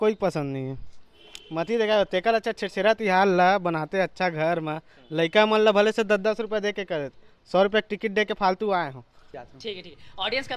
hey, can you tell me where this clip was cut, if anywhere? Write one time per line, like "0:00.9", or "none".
0:09.4